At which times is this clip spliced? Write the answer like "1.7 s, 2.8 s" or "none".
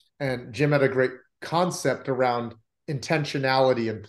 none